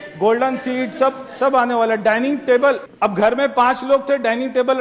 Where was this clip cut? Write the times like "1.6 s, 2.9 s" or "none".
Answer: 2.9 s